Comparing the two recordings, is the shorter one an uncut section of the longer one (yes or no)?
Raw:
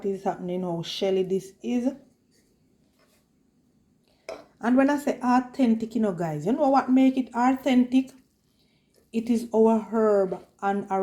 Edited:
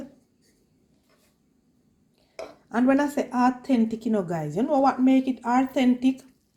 yes